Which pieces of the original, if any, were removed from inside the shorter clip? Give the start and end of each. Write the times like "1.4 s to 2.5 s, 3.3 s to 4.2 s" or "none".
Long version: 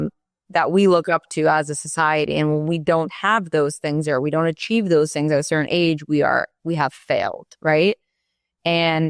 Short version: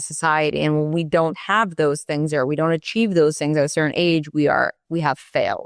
none